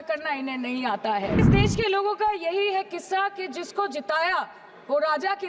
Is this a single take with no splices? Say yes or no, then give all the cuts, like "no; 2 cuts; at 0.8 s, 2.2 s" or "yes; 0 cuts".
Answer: no; 1 cut; at 1.4 s